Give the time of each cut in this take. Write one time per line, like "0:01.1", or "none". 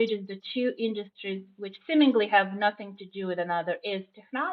none